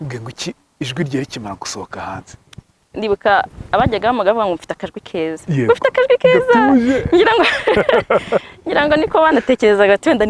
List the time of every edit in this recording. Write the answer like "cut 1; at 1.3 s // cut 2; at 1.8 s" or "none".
cut 1; at 2.8 s